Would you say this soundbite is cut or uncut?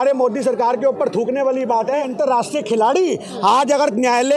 cut